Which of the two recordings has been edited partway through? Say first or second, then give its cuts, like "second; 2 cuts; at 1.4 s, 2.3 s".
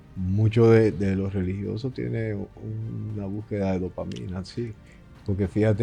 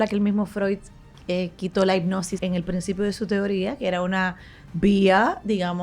second; 1 cut; at 2.3 s